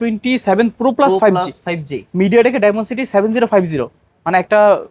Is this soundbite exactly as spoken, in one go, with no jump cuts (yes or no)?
yes